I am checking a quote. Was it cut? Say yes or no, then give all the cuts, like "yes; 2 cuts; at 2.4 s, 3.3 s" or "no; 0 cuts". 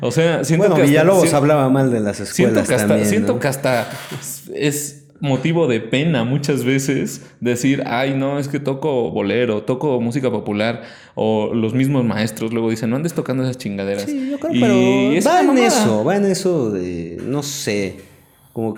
no; 0 cuts